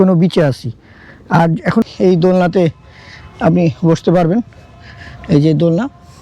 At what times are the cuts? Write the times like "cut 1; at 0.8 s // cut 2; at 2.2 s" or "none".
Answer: cut 1; at 1.9 s